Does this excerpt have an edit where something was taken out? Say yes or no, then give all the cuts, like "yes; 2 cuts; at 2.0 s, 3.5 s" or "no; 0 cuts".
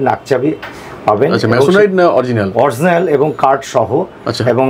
no; 0 cuts